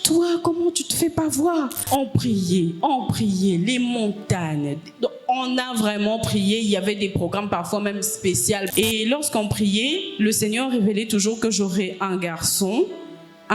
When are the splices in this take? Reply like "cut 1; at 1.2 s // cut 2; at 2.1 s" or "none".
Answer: cut 1; at 1.8 s // cut 2; at 8.7 s